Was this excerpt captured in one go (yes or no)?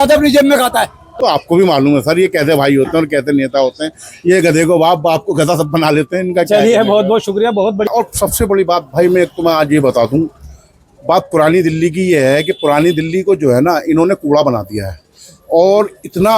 no